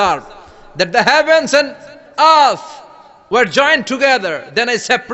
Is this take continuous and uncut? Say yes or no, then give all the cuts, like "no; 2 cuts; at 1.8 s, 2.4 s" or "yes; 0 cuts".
yes; 0 cuts